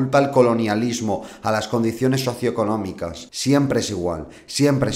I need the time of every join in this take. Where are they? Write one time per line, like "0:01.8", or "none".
0:03.1